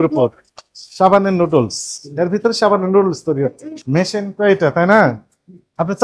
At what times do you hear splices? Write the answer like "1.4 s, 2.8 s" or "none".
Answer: 3.8 s